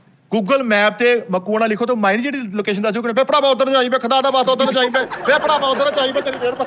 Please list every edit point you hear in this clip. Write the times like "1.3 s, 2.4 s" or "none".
none